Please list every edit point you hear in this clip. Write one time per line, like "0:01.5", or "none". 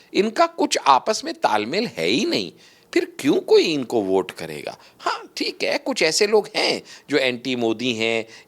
none